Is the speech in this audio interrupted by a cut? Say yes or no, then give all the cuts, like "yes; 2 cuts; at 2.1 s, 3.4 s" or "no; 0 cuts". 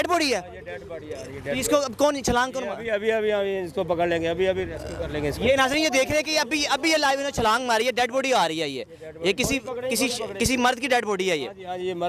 no; 0 cuts